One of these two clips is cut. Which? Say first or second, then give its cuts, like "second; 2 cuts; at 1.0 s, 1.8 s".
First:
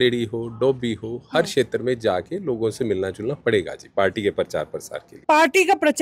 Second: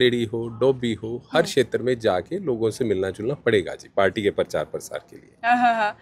first; 1 cut; at 5.1 s